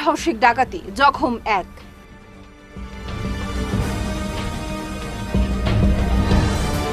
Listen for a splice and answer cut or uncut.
uncut